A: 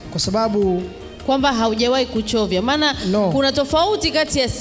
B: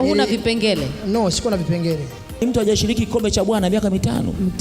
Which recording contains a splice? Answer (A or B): B